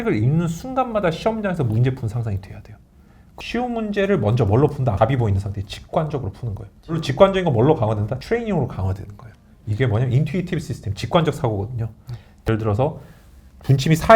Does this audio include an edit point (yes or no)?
yes